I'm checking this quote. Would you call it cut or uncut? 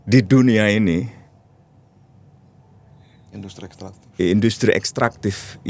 uncut